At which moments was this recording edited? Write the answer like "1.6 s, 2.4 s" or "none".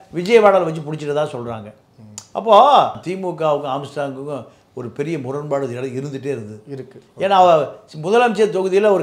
3.0 s